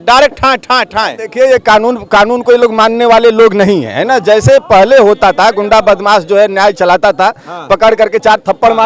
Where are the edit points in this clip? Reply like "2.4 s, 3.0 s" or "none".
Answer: none